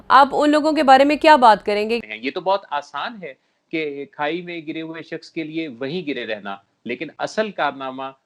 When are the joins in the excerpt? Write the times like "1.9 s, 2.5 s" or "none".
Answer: 2.0 s

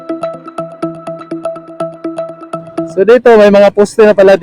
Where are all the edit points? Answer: 2.9 s

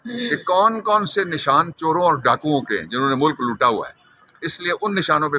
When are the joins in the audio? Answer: none

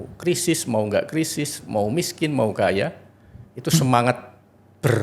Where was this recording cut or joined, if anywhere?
none

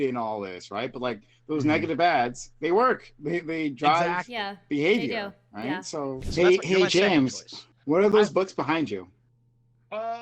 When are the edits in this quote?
6.2 s

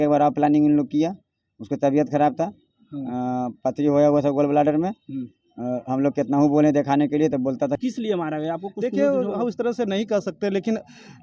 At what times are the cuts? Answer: 7.8 s

